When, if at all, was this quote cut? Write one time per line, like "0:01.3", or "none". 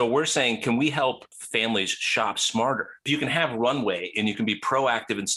0:01.3
0:03.0